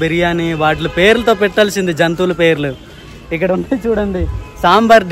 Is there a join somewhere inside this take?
no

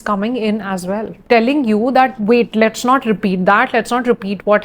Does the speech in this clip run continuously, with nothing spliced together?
no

